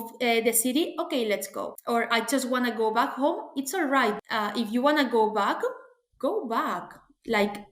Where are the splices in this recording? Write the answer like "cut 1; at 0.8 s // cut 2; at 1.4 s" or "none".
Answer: cut 1; at 4.3 s

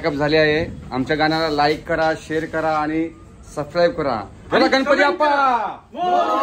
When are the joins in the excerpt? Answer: none

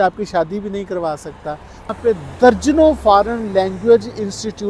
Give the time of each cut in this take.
cut 1; at 1.9 s

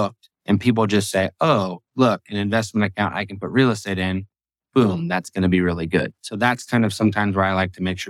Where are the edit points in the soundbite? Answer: none

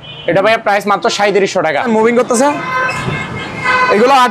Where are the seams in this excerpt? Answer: cut 1; at 1.9 s

